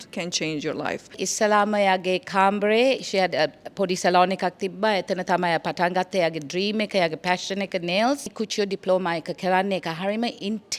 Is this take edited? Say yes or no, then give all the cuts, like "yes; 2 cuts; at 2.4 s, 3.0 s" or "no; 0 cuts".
yes; 2 cuts; at 1.2 s, 8.4 s